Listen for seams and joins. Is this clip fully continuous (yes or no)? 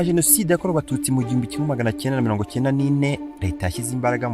no